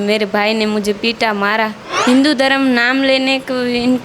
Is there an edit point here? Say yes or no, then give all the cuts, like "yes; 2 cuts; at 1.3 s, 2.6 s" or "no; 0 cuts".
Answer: yes; 1 cut; at 1.9 s